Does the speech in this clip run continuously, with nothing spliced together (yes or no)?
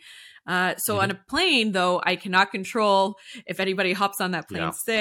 yes